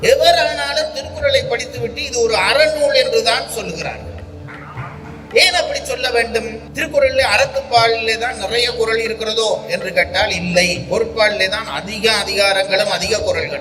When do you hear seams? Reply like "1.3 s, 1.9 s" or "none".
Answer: none